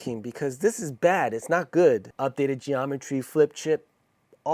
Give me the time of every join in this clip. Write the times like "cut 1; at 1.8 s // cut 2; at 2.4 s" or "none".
cut 1; at 2.1 s